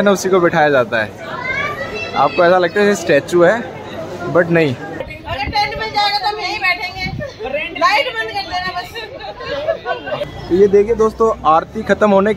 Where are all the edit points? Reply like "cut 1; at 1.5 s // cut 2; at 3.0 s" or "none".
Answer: cut 1; at 5.1 s // cut 2; at 10.2 s